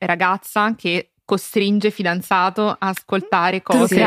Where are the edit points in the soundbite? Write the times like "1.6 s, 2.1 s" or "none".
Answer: none